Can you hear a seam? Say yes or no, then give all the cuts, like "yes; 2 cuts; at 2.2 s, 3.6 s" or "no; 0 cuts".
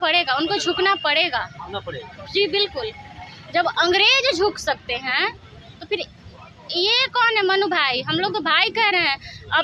no; 0 cuts